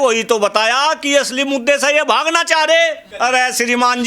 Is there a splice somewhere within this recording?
yes; 1 cut; at 3.0 s

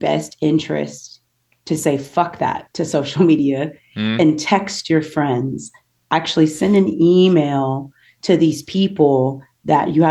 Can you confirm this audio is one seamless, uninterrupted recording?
yes; 0 cuts

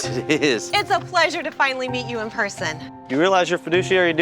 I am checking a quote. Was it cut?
yes; 1 cut; at 2.8 s

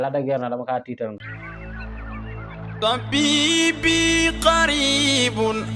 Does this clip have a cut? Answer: yes; 1 cut; at 1.0 s

